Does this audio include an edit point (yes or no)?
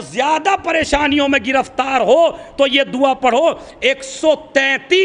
no